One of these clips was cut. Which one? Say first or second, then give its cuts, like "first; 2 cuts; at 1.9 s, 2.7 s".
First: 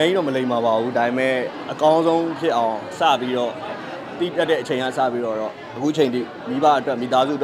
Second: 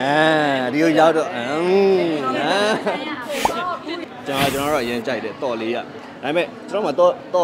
second; 1 cut; at 4.0 s